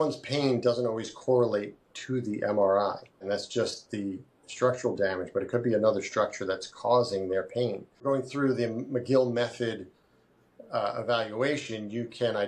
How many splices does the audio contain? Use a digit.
2